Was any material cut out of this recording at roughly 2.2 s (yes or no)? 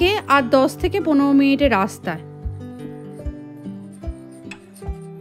no